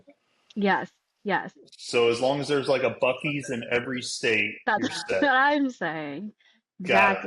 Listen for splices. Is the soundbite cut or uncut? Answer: uncut